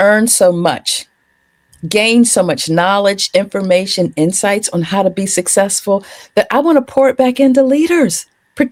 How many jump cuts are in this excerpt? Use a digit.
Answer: 0